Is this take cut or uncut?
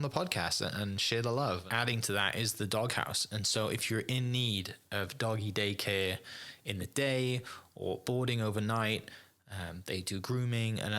cut